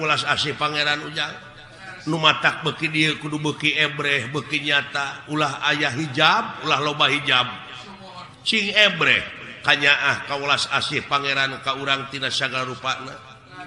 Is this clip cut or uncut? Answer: uncut